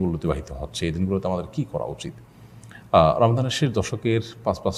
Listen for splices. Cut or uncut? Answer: uncut